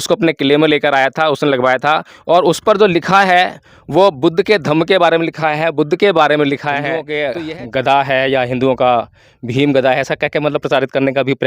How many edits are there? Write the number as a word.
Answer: two